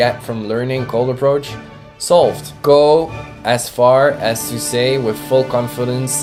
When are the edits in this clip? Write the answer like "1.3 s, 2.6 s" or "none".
none

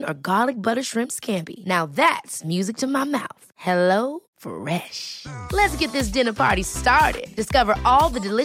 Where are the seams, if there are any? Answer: none

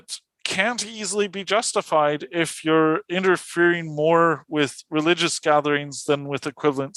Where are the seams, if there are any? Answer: none

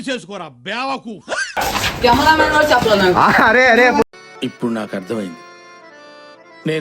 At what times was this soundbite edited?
1.6 s

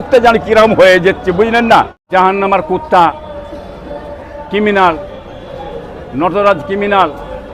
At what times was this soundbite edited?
2.0 s

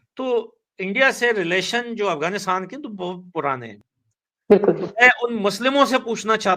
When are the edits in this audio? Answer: 3.8 s

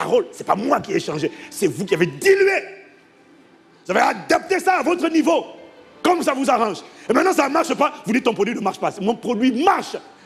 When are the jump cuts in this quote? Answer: none

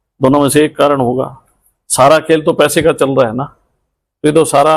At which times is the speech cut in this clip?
none

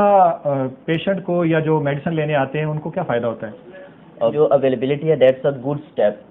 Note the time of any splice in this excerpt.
4.3 s

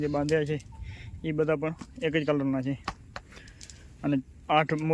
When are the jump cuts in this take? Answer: none

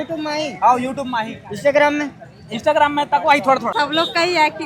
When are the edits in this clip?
3.7 s

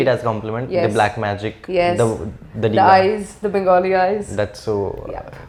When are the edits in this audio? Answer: none

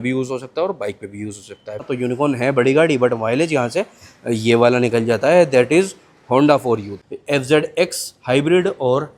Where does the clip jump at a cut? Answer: 1.8 s, 6.9 s

